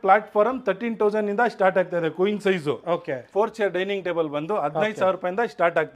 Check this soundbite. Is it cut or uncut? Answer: cut